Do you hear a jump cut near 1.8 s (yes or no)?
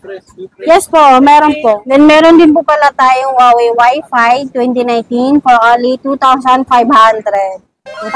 yes